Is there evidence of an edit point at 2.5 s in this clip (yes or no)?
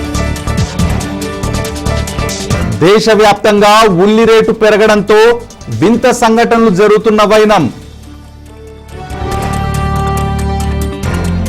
yes